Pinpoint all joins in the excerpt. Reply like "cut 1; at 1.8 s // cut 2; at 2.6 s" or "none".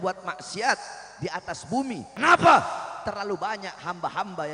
cut 1; at 2.1 s

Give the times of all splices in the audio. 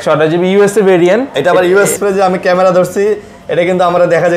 cut 1; at 1.9 s

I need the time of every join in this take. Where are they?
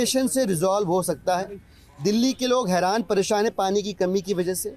none

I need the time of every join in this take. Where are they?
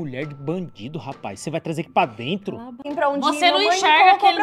cut 1; at 2.8 s

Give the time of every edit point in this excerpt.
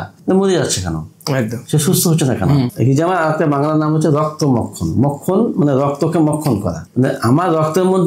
cut 1; at 2.7 s // cut 2; at 6.8 s

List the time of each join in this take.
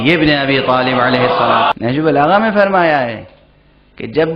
cut 1; at 1.7 s

